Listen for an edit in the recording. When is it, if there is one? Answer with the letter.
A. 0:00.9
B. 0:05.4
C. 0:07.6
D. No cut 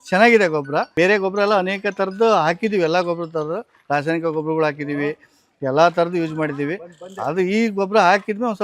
A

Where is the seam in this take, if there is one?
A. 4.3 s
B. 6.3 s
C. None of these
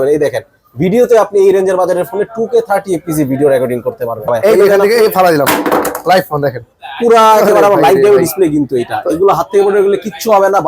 A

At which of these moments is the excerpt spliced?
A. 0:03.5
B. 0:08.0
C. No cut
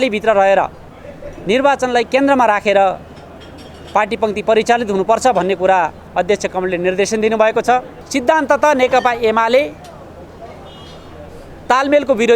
B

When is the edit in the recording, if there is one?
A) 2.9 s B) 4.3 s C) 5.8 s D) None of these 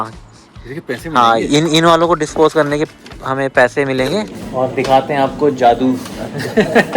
B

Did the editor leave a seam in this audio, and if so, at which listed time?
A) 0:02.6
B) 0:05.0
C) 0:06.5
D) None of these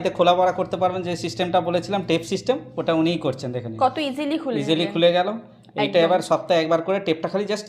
D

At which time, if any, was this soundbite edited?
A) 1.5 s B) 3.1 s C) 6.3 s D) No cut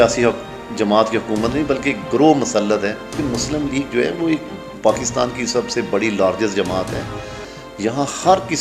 B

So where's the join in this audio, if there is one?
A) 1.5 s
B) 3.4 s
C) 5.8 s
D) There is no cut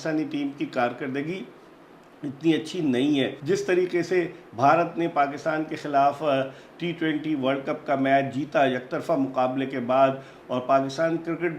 B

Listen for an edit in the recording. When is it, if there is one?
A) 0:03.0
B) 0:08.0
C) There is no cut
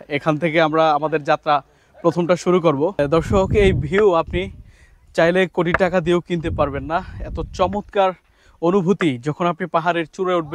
A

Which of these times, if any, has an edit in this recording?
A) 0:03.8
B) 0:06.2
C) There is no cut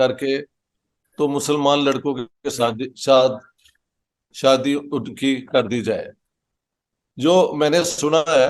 C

